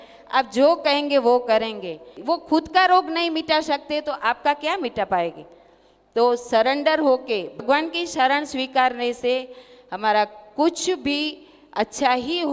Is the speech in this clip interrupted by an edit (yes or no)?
yes